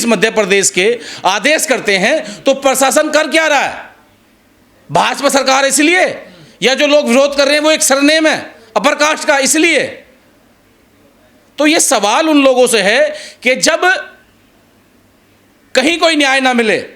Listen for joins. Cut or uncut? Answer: uncut